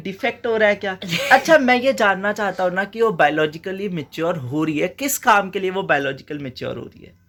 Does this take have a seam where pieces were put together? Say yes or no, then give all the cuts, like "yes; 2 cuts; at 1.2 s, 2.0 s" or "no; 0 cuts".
no; 0 cuts